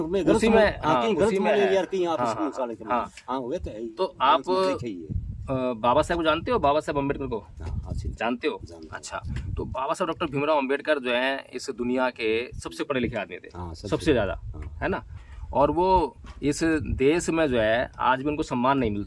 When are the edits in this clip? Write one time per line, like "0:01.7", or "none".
none